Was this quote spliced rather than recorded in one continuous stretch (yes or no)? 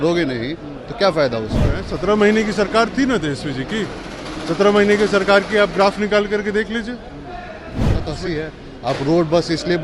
yes